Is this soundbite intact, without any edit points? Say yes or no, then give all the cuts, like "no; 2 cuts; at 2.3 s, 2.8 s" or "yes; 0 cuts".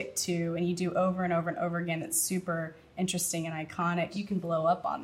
no; 1 cut; at 4.1 s